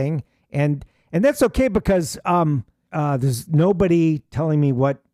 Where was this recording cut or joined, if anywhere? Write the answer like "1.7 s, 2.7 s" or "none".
2.8 s